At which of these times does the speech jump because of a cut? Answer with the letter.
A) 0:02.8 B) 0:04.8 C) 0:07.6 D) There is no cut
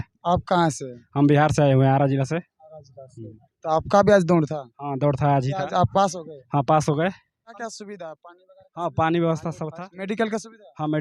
C